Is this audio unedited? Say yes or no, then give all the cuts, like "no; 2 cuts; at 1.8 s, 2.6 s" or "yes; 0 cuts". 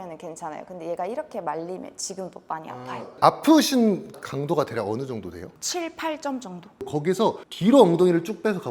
no; 4 cuts; at 3.1 s, 4.2 s, 5.5 s, 6.9 s